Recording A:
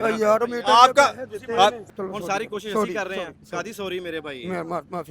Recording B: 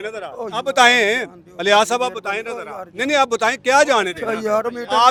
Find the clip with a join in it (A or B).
A